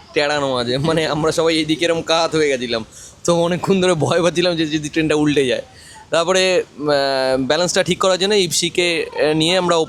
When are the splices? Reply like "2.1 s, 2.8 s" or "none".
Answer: none